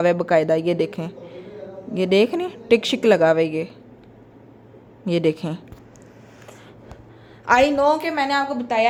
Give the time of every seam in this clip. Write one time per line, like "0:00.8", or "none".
none